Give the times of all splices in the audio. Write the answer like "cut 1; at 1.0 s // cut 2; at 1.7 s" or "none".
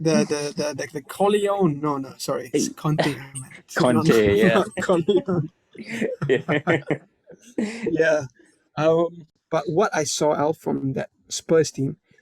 cut 1; at 9.4 s